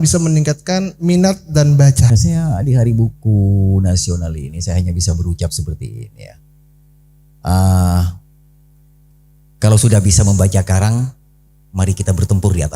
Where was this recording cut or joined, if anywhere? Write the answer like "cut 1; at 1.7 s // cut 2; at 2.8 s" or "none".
cut 1; at 2.1 s